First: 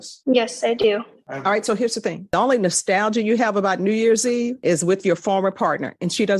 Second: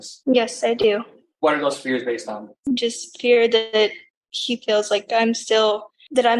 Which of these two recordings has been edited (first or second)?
first